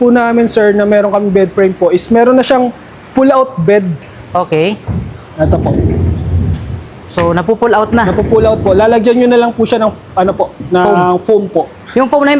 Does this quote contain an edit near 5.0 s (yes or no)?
no